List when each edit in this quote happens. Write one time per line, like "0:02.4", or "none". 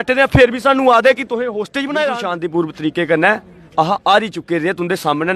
0:02.3